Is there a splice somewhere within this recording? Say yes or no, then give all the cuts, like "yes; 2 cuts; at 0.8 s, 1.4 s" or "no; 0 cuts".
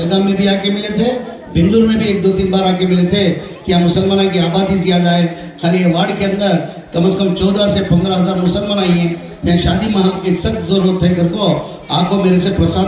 no; 0 cuts